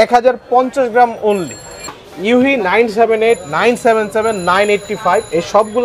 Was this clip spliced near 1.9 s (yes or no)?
yes